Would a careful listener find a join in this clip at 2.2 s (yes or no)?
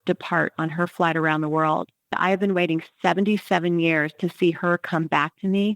yes